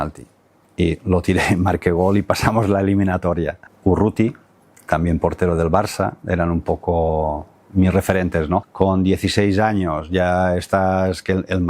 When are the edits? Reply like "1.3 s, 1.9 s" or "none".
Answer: 3.6 s, 8.7 s

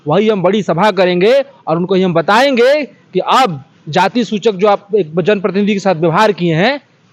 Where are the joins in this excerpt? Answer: none

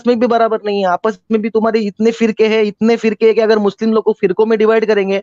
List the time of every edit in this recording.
none

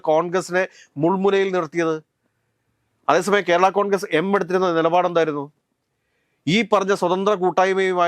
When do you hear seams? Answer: none

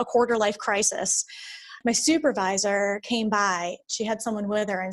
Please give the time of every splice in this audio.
1.7 s, 3.8 s

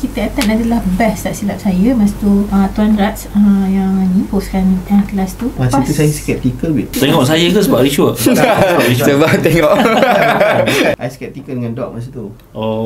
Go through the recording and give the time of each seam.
2.5 s, 4.3 s, 5.6 s, 6.9 s, 11.0 s

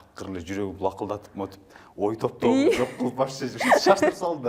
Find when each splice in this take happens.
none

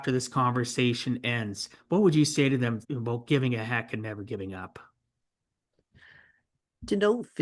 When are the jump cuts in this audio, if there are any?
2.9 s

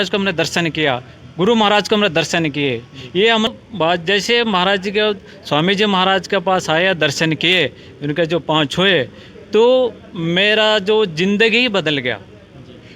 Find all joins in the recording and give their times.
3.5 s

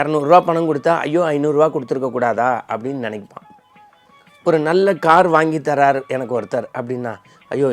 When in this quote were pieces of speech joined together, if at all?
none

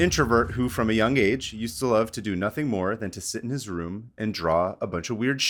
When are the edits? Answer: none

